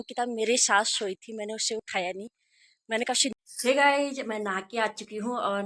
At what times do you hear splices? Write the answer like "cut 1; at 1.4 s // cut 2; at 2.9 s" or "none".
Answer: cut 1; at 3.4 s